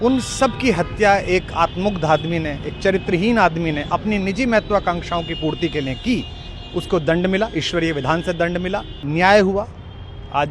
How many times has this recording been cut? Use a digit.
1